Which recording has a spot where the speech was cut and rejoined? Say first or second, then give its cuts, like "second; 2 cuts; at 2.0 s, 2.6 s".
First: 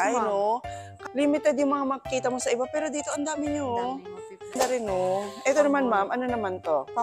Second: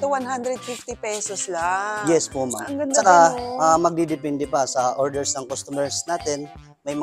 first; 2 cuts; at 1.0 s, 4.5 s